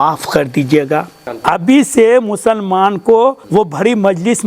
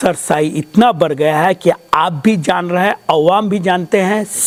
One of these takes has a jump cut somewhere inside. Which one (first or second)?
first